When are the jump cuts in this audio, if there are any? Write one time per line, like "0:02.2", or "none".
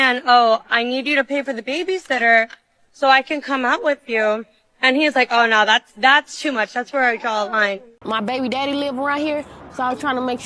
0:07.9